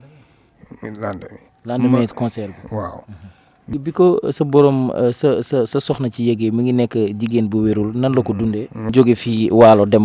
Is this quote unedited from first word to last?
no; 2 cuts; at 3.7 s, 8.9 s

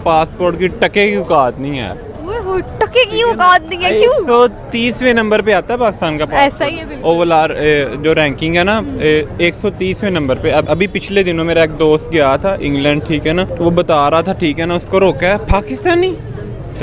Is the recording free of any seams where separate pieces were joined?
yes; 0 cuts

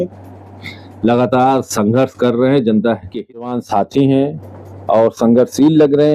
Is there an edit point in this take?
yes; 1 cut; at 3.5 s

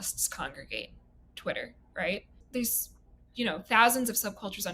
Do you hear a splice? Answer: yes; 1 cut; at 2.4 s

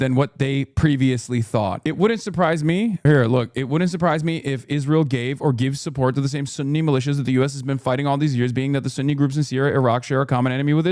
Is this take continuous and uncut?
no; 2 cuts; at 1.8 s, 3.0 s

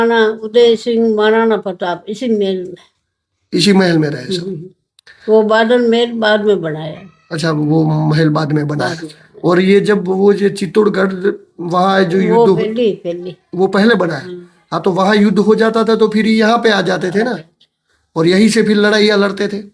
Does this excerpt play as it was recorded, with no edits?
yes; 0 cuts

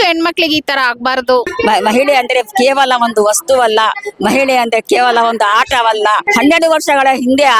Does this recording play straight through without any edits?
no; 2 cuts; at 1.5 s, 6.2 s

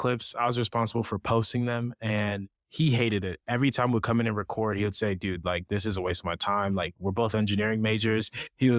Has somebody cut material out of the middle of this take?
no; 0 cuts

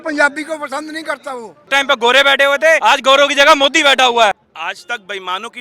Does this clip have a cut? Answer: yes; 3 cuts; at 1.6 s, 2.8 s, 4.5 s

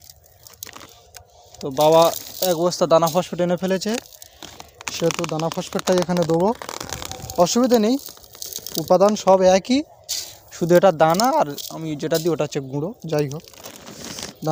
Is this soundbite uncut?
yes; 0 cuts

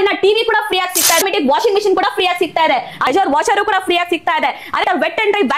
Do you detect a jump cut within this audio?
yes; 3 cuts; at 1.2 s, 3.1 s, 4.8 s

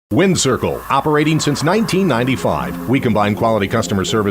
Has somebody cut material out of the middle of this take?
yes; 1 cut; at 1.9 s

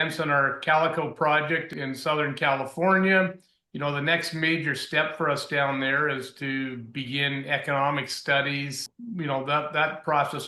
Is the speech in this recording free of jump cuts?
no; 1 cut; at 8.8 s

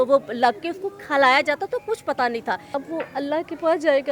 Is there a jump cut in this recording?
yes; 1 cut; at 2.7 s

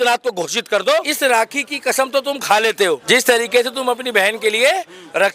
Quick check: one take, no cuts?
no; 2 cuts; at 1.1 s, 3.0 s

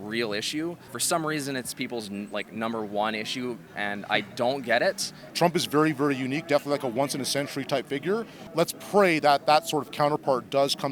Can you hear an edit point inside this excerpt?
yes; 4 cuts; at 0.9 s, 3.6 s, 5.2 s, 8.4 s

